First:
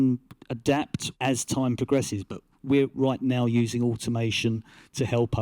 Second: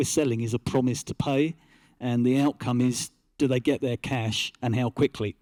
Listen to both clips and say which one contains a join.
first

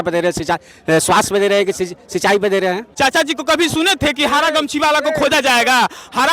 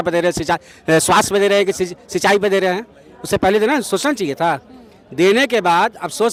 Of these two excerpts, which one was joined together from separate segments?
first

